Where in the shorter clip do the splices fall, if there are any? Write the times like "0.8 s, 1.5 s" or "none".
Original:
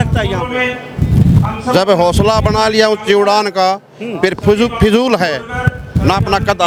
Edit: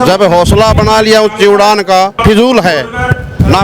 2.2 s